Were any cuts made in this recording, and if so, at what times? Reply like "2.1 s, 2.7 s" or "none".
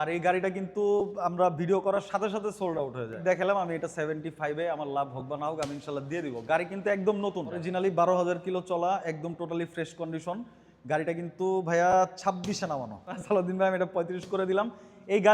3.3 s, 7.6 s, 13.2 s